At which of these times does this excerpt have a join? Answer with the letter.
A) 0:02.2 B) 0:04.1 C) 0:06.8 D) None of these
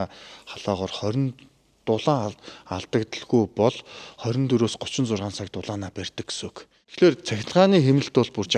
C